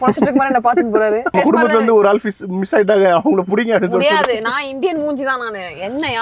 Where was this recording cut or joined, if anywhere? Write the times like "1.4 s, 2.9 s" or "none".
1.3 s